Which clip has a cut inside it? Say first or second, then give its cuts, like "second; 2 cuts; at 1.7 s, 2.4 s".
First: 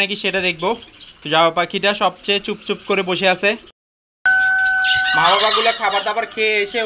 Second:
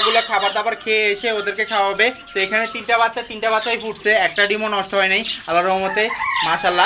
first; 1 cut; at 4.2 s